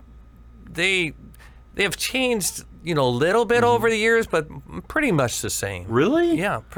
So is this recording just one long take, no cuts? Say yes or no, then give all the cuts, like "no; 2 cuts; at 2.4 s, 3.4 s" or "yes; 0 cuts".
yes; 0 cuts